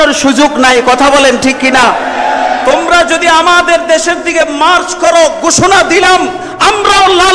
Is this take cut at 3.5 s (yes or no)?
no